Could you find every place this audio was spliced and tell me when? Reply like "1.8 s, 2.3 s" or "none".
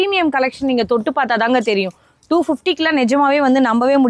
none